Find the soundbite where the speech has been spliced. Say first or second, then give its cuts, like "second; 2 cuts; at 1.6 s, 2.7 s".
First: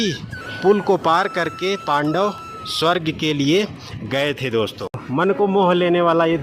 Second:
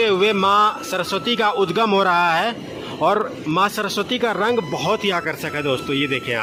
first; 1 cut; at 5.0 s